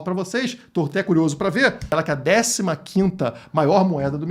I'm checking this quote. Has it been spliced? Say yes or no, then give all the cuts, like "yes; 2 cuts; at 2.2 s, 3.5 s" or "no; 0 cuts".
yes; 1 cut; at 1.9 s